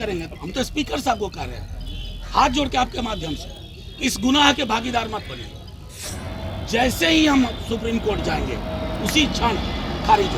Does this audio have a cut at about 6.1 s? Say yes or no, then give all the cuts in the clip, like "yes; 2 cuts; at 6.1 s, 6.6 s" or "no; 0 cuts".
yes; 1 cut; at 6.1 s